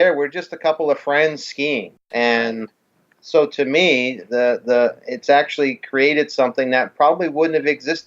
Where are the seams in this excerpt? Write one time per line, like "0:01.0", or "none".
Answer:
0:02.0